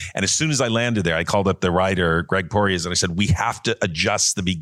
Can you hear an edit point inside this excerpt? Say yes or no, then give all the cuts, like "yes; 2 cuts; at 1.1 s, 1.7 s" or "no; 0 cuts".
no; 0 cuts